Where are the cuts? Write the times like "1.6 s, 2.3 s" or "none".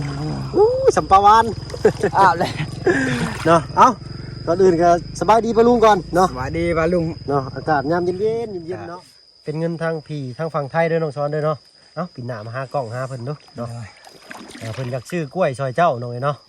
8.7 s